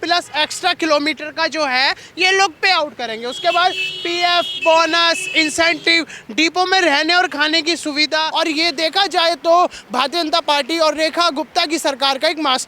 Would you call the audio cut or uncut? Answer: cut